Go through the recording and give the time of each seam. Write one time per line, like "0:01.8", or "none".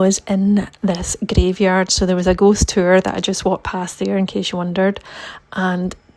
none